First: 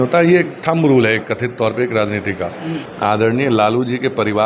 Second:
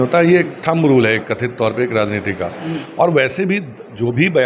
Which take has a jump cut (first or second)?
first